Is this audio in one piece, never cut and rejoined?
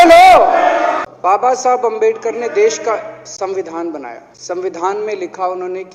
no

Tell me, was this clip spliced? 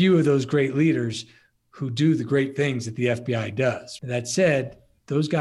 yes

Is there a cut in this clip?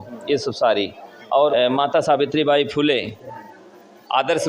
yes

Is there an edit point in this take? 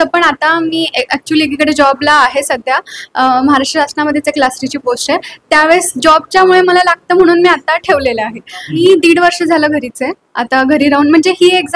yes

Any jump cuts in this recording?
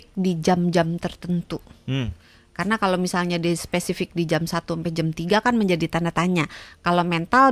no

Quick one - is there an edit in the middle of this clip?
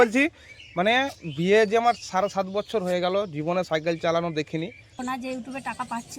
yes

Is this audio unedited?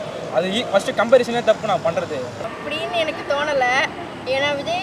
no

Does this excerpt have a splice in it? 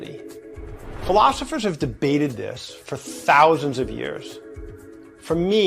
no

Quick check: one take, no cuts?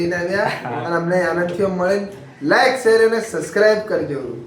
yes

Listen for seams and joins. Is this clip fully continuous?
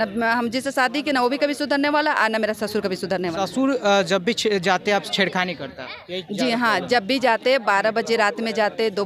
yes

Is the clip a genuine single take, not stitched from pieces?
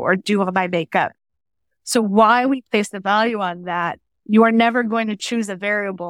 no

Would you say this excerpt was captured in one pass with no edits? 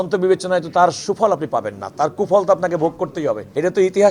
yes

